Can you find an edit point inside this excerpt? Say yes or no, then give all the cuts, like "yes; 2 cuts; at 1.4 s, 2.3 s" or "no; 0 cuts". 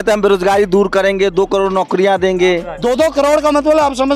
yes; 1 cut; at 2.7 s